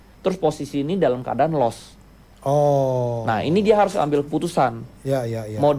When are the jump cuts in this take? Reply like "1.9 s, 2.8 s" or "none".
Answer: none